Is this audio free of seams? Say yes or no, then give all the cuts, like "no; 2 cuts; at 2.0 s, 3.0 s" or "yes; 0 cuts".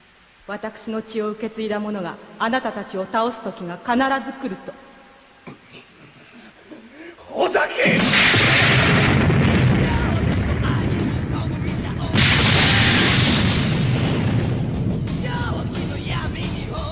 yes; 0 cuts